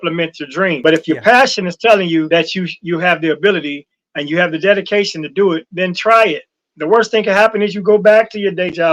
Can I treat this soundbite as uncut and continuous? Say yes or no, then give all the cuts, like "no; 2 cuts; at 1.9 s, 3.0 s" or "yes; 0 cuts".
no; 2 cuts; at 0.8 s, 2.3 s